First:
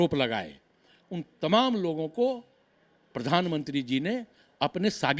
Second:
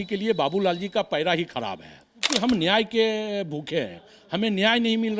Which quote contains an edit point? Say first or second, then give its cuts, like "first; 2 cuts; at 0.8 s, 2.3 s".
second; 1 cut; at 2.3 s